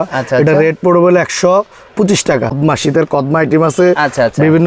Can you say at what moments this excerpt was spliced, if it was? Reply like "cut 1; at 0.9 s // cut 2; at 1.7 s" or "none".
cut 1; at 2.6 s